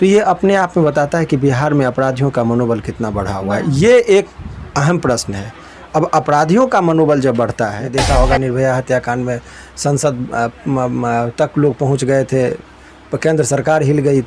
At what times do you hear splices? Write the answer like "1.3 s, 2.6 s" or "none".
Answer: 7.8 s